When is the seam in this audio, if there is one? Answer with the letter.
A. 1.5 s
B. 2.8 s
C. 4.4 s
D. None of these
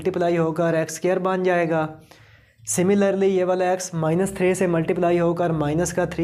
D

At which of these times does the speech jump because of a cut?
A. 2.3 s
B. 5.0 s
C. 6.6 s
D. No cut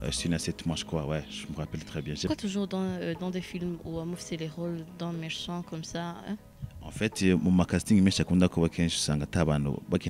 A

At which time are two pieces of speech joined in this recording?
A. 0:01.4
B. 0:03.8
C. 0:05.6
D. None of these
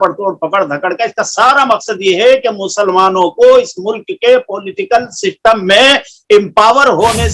D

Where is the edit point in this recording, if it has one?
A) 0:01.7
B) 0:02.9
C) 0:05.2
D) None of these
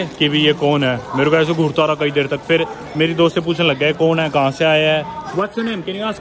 C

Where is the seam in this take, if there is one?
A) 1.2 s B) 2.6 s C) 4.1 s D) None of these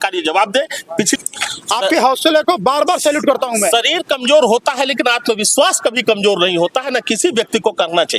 A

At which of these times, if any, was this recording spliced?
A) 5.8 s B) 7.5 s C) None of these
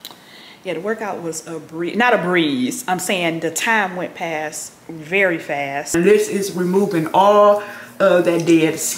A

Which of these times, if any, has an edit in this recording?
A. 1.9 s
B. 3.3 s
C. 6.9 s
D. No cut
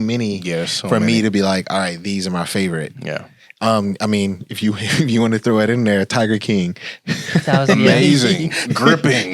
D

